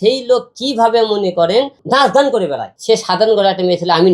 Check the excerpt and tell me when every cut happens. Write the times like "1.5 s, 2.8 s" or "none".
1.8 s, 2.7 s